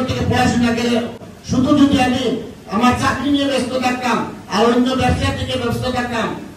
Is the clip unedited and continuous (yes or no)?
no